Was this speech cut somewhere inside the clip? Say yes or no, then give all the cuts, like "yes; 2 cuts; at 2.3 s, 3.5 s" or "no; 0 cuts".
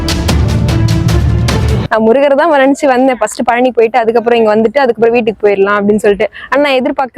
yes; 1 cut; at 1.8 s